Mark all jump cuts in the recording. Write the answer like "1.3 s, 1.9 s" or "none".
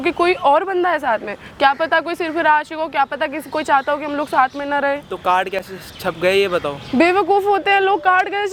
none